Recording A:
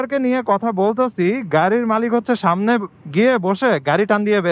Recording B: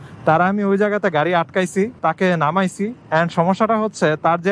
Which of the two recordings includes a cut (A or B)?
B